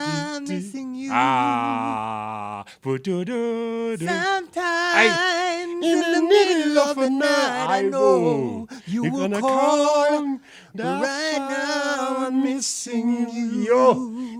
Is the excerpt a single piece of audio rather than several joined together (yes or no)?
yes